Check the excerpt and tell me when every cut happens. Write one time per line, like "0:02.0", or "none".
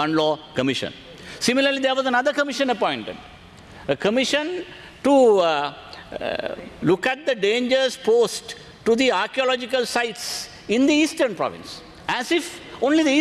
none